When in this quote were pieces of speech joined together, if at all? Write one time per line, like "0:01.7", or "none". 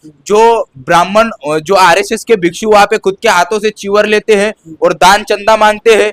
none